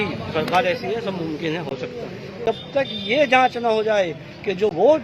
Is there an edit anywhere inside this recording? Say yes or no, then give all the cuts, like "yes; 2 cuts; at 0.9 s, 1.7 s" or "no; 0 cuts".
yes; 1 cut; at 2.4 s